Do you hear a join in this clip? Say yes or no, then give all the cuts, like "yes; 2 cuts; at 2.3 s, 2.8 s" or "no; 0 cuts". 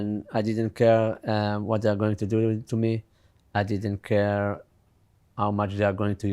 no; 0 cuts